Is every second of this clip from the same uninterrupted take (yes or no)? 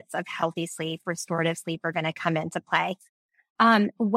yes